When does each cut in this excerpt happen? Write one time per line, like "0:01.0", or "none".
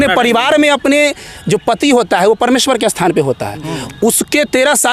none